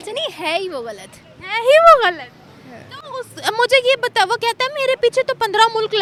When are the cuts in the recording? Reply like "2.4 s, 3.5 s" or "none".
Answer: none